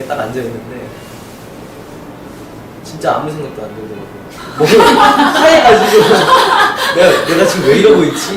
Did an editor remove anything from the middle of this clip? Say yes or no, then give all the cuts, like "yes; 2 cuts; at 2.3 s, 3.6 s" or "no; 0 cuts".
no; 0 cuts